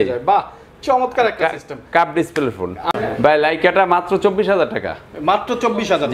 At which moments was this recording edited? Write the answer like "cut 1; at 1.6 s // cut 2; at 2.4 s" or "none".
none